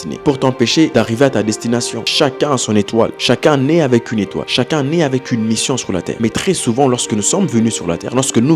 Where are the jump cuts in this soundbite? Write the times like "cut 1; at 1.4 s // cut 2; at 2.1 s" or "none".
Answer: cut 1; at 0.9 s // cut 2; at 2.0 s // cut 3; at 4.4 s // cut 4; at 6.1 s